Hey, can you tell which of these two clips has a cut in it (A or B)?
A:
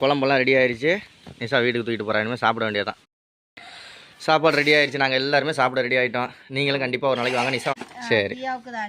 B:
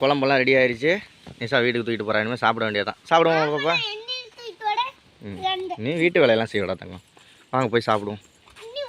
A